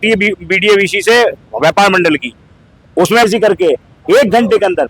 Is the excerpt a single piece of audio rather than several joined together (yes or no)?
no